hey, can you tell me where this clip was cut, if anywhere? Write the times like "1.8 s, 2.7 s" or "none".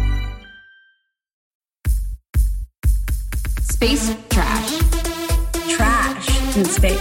1.4 s